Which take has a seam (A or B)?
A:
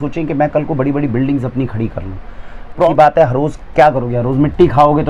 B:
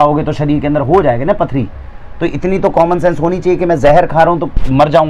A